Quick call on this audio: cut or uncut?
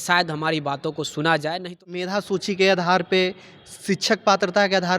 cut